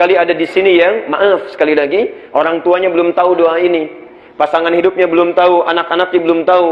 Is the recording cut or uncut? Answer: uncut